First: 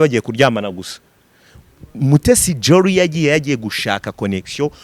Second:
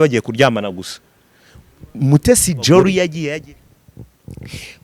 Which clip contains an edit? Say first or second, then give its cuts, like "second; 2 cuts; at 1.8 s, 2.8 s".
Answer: second; 1 cut; at 3.3 s